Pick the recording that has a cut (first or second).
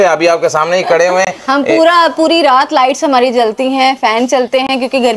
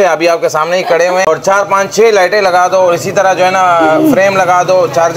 second